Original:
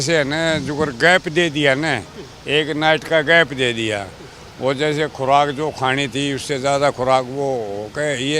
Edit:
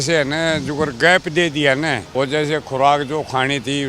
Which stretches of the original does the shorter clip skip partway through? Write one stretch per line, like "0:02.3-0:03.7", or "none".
0:02.0-0:04.5